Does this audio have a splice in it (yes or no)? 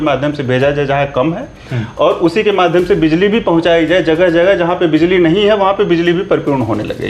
no